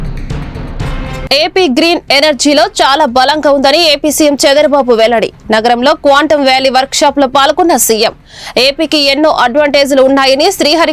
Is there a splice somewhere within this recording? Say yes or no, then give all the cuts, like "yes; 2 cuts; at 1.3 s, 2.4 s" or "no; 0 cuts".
yes; 1 cut; at 1.2 s